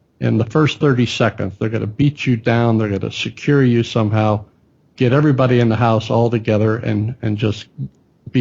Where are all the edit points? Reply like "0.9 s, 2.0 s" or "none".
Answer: none